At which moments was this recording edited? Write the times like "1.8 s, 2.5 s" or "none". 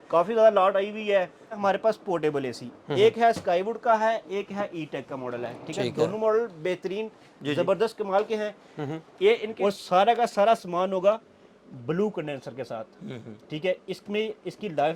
1.6 s, 9.5 s